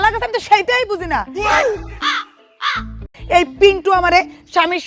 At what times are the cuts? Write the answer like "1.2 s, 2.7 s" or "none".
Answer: 3.0 s